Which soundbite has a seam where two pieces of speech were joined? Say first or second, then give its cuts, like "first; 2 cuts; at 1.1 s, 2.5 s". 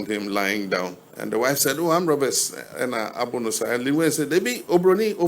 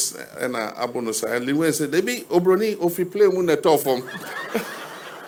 first; 1 cut; at 1.1 s